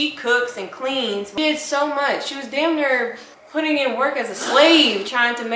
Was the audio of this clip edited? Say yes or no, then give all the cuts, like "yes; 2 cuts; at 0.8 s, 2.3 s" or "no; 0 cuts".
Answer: yes; 1 cut; at 1.3 s